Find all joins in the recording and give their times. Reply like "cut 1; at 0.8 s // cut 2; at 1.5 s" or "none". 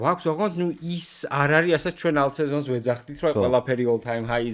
none